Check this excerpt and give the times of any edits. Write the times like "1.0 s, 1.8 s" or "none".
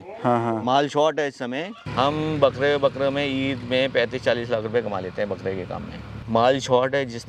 1.8 s, 6.2 s

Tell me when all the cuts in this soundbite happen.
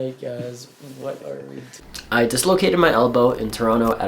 1.8 s

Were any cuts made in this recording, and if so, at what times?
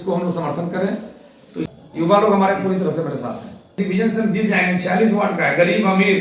1.7 s, 3.7 s

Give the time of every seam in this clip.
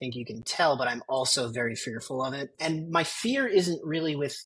2.5 s

